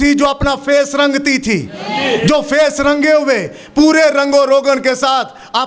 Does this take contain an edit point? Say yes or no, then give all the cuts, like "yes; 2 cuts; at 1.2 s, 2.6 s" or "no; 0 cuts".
no; 0 cuts